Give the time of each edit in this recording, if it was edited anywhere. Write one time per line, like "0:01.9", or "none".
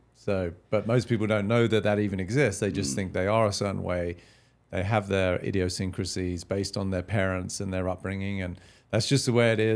none

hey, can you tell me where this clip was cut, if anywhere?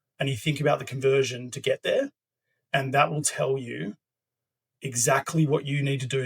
none

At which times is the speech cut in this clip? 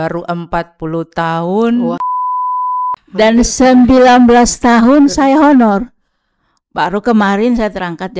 0:02.5

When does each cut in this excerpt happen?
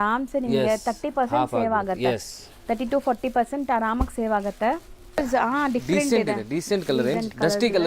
0:05.2

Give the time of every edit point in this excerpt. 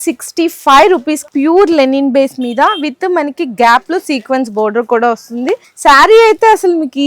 0:01.2
0:05.7

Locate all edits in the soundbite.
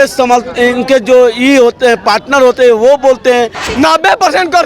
0:03.7

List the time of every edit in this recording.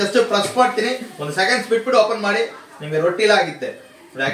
none

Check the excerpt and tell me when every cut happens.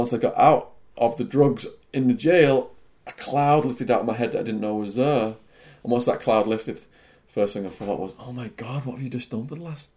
none

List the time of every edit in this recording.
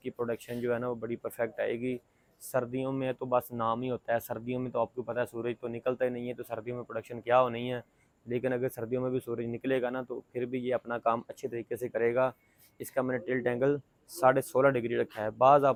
none

